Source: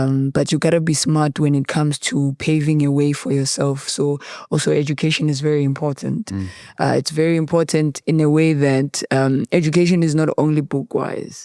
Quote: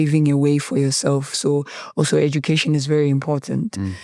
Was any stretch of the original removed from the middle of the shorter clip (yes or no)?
no